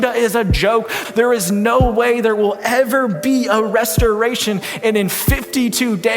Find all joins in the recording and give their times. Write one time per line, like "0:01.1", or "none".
0:01.0